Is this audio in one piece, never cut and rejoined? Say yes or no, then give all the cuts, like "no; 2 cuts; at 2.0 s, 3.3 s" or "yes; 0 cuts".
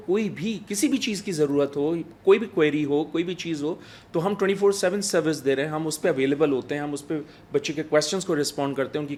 yes; 0 cuts